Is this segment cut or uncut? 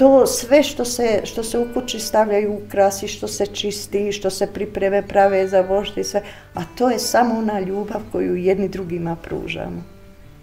uncut